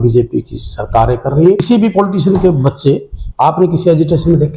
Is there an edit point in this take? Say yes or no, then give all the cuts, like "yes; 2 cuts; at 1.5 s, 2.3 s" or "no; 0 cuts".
yes; 1 cut; at 1.6 s